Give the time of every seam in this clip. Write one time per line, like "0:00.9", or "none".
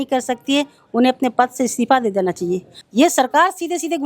0:02.7